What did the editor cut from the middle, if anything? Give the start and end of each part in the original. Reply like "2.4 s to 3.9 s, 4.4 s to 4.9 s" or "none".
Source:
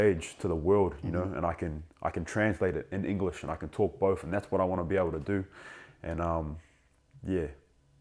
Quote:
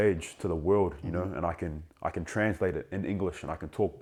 none